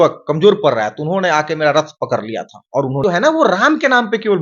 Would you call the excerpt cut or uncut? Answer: cut